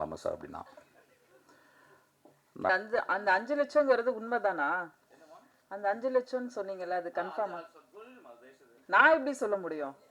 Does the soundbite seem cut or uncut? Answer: cut